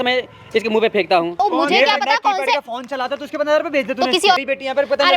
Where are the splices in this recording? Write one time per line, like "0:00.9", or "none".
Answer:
0:01.3
0:04.4